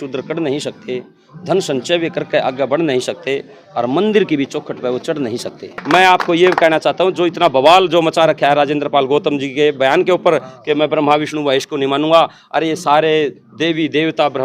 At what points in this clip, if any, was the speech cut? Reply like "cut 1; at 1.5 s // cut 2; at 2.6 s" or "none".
cut 1; at 5.8 s